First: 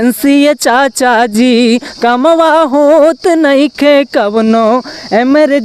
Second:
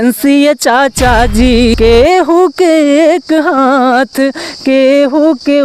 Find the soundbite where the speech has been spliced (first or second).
second